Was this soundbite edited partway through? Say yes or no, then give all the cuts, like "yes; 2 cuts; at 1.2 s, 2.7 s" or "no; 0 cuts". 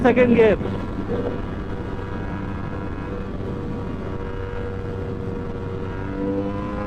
no; 0 cuts